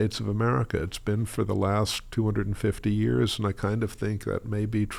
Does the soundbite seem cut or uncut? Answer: uncut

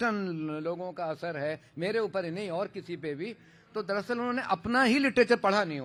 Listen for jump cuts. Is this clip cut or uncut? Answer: uncut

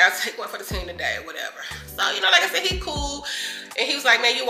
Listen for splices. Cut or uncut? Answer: uncut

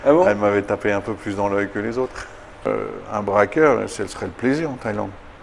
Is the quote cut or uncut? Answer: cut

